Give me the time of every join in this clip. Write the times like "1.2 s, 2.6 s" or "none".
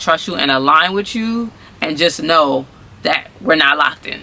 none